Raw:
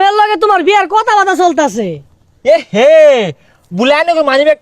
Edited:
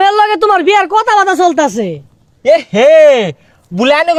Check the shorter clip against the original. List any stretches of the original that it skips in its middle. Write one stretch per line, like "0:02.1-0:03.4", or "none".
none